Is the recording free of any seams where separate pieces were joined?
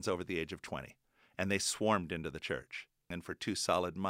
no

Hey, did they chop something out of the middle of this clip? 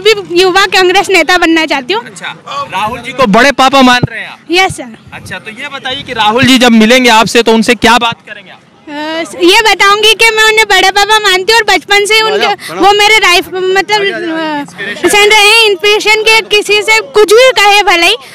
no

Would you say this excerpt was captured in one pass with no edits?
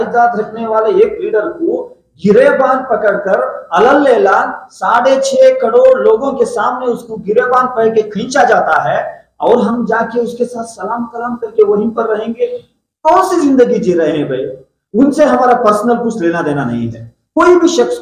yes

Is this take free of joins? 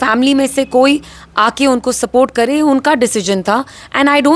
yes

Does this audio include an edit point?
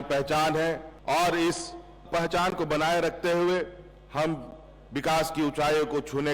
yes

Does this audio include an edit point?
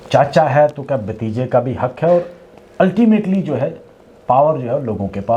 no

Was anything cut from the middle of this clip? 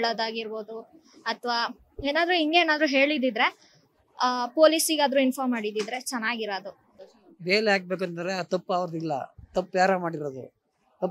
yes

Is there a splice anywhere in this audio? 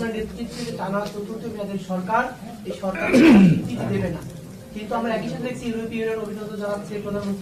no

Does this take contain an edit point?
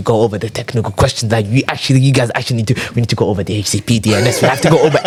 no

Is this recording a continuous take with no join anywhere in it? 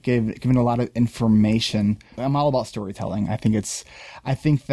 no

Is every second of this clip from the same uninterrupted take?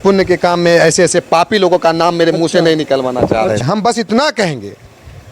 no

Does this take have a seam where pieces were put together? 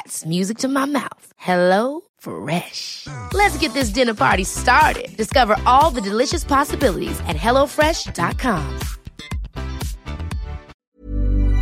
yes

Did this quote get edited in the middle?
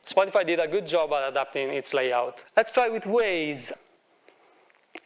yes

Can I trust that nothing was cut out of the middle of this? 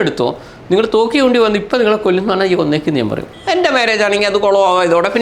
no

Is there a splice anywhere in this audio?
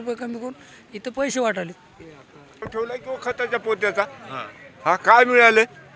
no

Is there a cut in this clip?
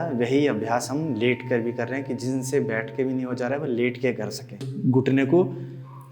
yes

